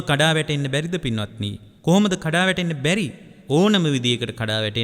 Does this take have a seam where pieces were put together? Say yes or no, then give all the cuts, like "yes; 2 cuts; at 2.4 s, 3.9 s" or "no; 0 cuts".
no; 0 cuts